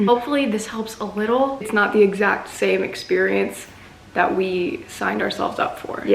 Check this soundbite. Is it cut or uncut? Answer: cut